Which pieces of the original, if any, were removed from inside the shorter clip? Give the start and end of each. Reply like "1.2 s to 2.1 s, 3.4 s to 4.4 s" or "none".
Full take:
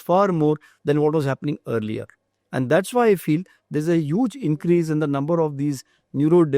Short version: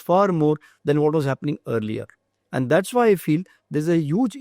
none